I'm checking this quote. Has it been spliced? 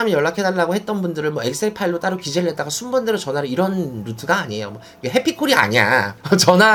no; 0 cuts

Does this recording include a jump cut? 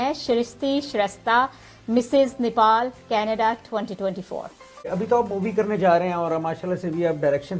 yes; 1 cut; at 4.8 s

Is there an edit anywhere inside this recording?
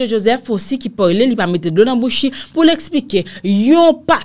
no; 0 cuts

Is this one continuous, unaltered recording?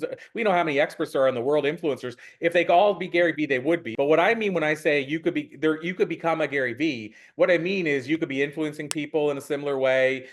no; 1 cut; at 3.9 s

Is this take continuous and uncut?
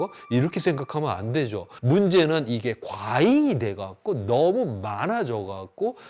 no; 1 cut; at 1.7 s

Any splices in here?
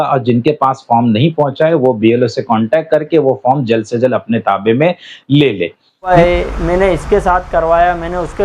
yes; 1 cut; at 6.1 s

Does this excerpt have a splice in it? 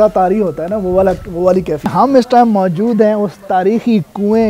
yes; 1 cut; at 1.9 s

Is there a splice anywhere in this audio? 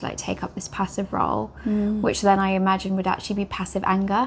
no; 0 cuts

